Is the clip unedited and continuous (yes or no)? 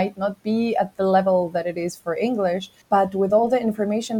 no